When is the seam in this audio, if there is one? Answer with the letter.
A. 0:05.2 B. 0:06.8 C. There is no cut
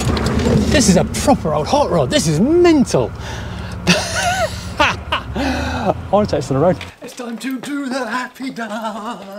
B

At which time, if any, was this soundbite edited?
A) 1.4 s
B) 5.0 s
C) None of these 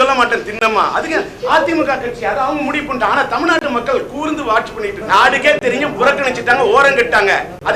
B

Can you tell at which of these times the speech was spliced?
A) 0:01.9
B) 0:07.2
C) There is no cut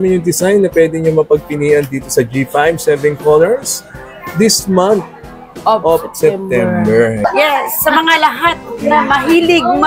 B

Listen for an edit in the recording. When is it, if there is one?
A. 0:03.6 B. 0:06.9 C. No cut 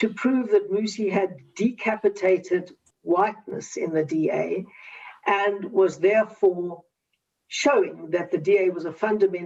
C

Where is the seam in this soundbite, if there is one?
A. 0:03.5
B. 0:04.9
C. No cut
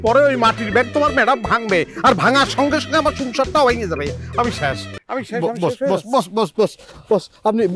B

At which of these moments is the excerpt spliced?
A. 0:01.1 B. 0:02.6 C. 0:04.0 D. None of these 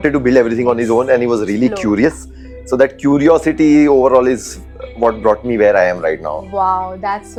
D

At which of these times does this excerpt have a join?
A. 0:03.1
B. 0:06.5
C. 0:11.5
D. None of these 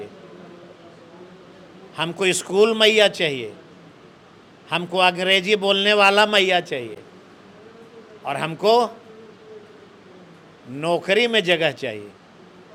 D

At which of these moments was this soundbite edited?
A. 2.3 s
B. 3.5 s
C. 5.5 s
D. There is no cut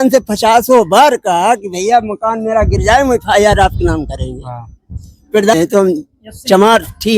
C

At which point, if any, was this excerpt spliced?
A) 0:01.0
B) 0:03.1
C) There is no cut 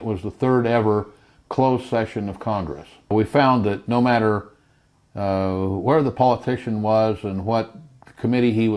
B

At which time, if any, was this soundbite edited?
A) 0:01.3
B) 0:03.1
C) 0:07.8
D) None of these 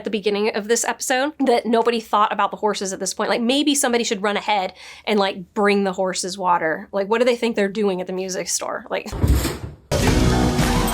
A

